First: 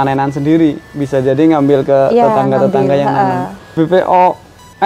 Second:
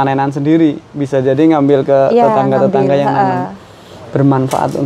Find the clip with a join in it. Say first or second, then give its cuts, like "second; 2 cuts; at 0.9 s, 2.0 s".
first; 1 cut; at 3.7 s